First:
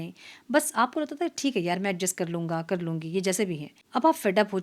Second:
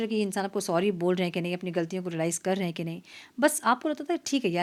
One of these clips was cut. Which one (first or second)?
first